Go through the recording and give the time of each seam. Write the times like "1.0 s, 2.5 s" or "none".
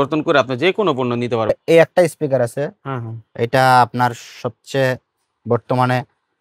1.5 s